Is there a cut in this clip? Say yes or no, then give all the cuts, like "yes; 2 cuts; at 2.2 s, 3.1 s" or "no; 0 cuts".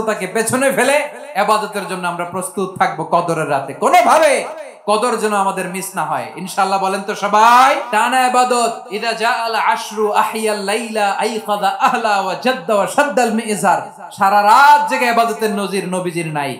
yes; 2 cuts; at 7.8 s, 8.9 s